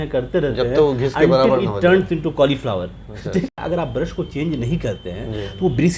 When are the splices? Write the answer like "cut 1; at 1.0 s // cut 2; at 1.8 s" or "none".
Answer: cut 1; at 3.5 s